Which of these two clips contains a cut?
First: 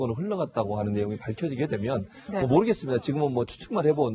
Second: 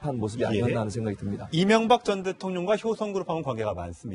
first; 1 cut; at 3.2 s

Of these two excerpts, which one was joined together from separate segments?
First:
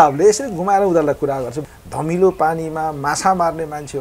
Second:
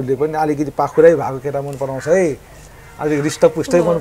first; 1 cut; at 1.5 s

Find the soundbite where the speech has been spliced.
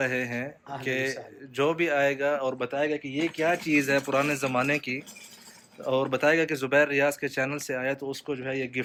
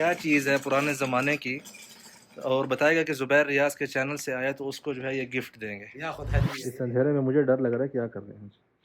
second; 1 cut; at 6.5 s

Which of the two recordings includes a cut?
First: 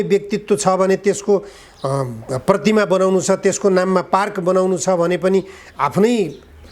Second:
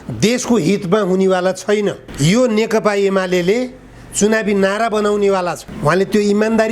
second; 2 cuts; at 2.1 s, 5.6 s

